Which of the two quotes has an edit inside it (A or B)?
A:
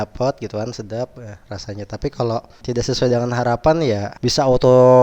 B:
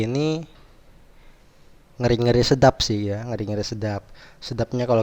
A